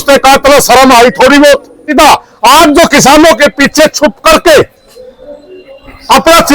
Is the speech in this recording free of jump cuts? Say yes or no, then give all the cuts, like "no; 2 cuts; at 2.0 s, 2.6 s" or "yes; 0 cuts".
no; 1 cut; at 1.9 s